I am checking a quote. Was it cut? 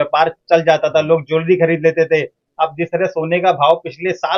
no; 0 cuts

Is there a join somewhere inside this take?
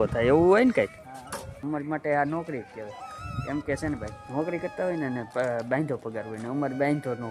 yes; 2 cuts; at 1.6 s, 4.2 s

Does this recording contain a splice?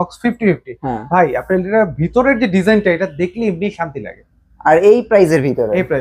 no; 0 cuts

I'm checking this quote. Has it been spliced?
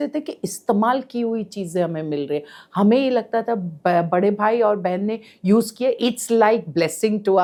no; 0 cuts

